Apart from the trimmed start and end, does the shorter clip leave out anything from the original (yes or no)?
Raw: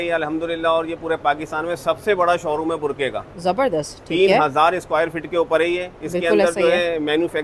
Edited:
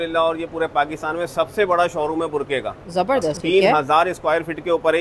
yes